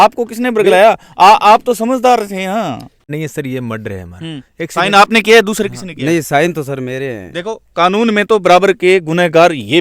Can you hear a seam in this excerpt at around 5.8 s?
no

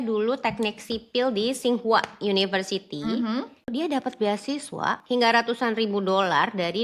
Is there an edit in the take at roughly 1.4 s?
no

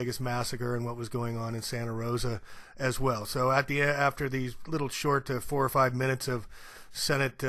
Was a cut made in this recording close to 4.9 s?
no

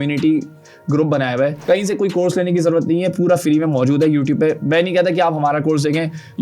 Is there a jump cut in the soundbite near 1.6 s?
yes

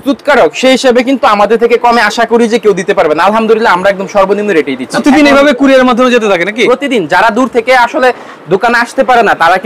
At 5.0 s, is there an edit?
yes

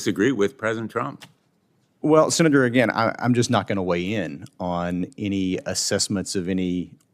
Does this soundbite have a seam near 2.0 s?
no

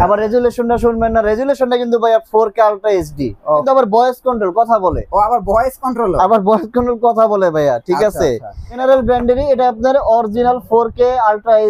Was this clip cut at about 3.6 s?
yes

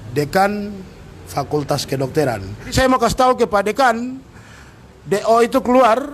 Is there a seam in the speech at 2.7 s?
yes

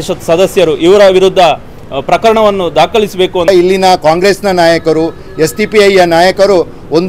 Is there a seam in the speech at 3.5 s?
yes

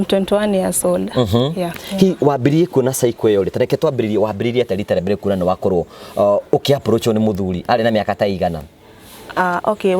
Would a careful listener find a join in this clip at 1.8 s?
yes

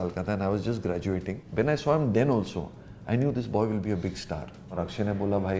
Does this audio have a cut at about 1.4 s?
yes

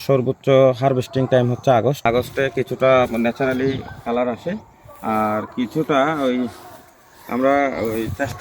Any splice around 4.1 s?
no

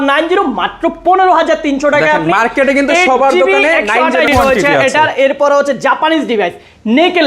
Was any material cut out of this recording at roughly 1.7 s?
no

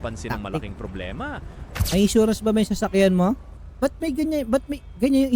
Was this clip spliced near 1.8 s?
yes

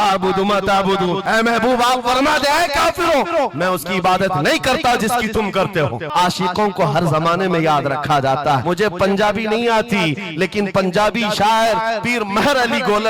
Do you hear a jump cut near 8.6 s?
yes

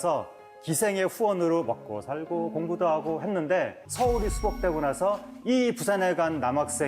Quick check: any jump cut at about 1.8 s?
no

